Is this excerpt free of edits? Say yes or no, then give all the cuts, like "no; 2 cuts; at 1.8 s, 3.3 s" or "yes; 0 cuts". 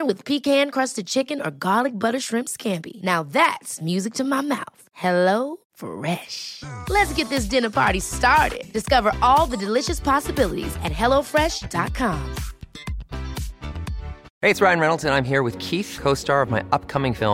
no; 1 cut; at 14.2 s